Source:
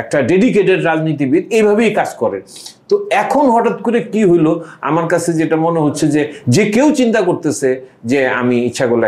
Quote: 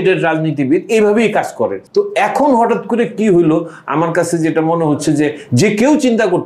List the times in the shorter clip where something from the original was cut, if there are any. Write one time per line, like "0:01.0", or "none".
0:01.8